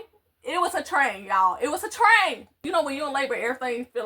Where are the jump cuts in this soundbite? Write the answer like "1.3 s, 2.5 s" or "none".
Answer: 2.6 s